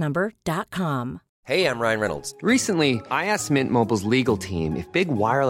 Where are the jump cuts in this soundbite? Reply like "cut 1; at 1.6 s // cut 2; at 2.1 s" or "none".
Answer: cut 1; at 1.3 s